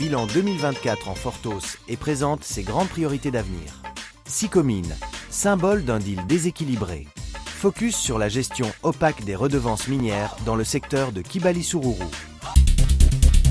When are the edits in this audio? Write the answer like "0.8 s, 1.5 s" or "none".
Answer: 12.5 s